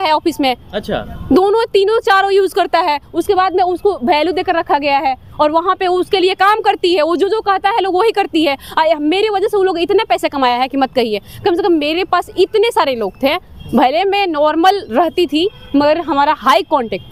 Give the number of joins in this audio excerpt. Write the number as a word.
zero